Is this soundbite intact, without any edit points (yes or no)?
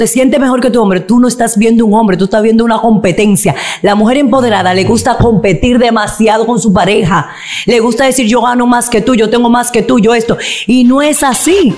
yes